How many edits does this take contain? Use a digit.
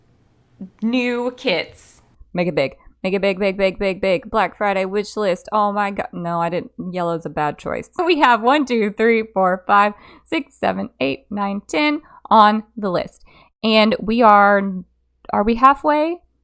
2